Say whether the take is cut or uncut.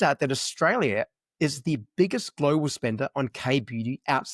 uncut